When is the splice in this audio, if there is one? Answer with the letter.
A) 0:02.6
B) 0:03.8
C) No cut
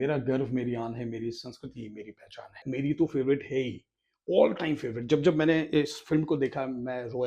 A